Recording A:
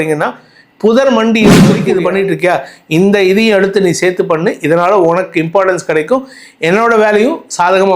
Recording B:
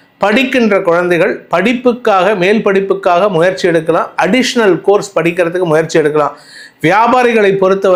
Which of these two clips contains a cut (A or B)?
A